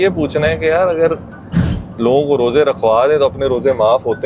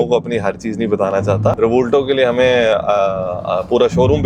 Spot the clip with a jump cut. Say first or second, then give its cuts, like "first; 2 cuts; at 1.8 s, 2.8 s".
second; 1 cut; at 1.6 s